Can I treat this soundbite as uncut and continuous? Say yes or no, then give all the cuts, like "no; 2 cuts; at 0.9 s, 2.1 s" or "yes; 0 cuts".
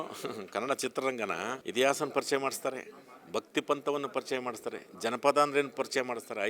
no; 1 cut; at 1.6 s